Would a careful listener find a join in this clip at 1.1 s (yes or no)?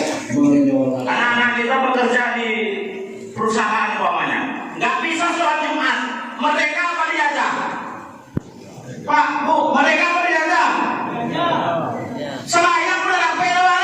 yes